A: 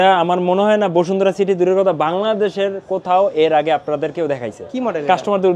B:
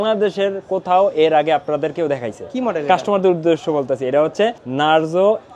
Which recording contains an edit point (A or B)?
B